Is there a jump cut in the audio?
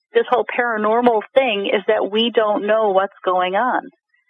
no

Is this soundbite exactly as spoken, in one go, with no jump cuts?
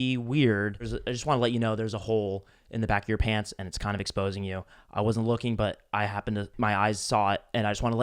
no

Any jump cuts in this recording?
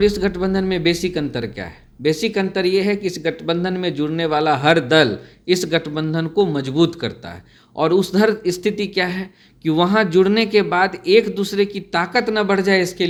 no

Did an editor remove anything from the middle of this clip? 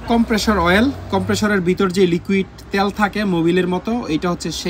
no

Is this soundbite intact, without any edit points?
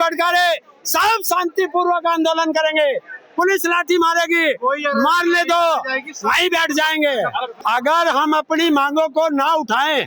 no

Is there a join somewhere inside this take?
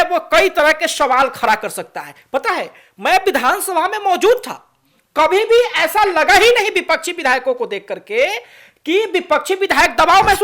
no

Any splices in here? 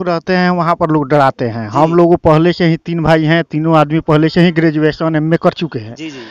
no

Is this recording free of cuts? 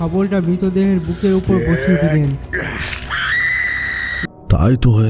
no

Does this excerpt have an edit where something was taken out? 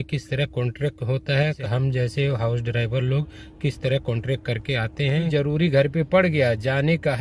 yes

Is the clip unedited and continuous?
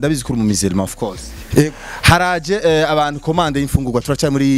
yes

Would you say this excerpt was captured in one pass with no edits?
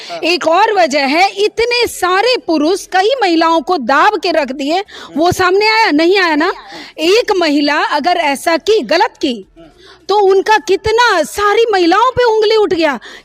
yes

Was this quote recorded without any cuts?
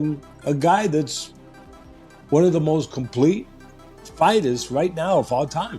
yes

